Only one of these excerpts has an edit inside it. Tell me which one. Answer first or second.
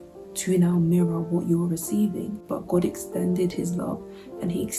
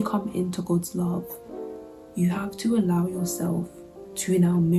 first